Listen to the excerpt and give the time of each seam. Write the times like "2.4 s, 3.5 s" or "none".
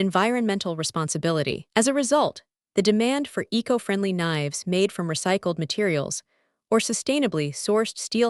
1.6 s